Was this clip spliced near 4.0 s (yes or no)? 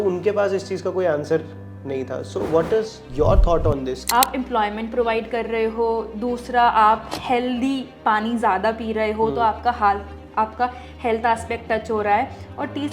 yes